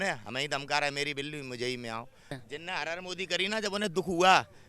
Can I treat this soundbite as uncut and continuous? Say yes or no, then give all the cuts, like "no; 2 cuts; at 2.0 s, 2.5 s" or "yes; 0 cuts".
no; 1 cut; at 2.4 s